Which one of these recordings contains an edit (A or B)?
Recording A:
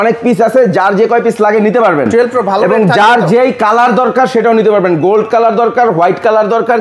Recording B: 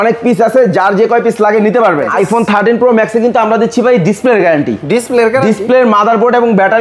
B